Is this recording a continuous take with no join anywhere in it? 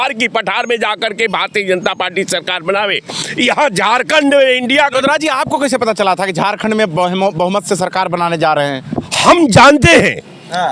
yes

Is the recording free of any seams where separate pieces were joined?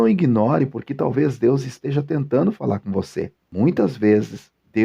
no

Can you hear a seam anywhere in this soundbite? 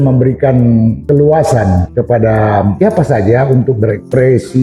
yes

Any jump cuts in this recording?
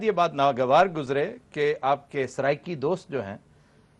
no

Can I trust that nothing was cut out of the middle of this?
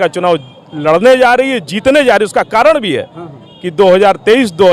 yes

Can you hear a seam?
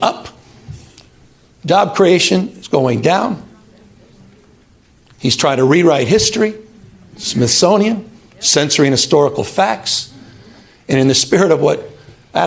no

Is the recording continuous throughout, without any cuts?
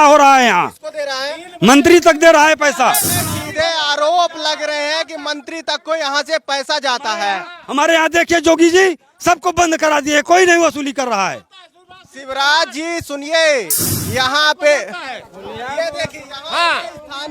no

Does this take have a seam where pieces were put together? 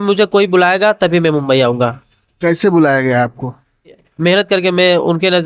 yes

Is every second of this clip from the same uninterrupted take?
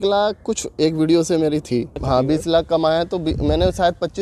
no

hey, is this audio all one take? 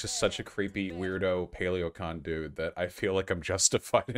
no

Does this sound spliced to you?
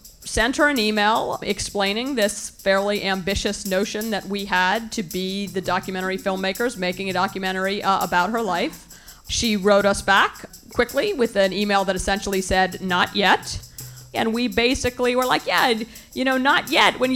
yes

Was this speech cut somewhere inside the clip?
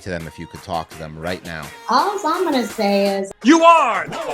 yes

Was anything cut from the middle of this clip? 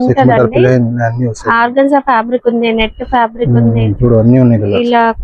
no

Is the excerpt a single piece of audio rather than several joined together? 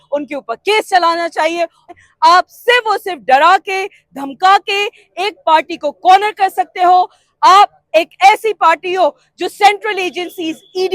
no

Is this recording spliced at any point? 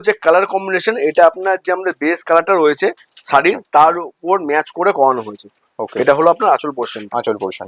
no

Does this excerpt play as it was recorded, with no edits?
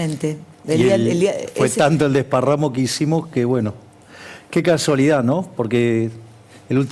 yes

